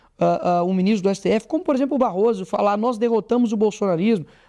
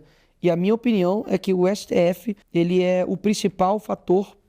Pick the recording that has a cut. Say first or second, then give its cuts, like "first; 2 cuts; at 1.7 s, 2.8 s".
second; 1 cut; at 2.3 s